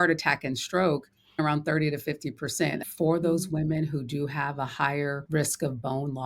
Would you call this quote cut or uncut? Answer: cut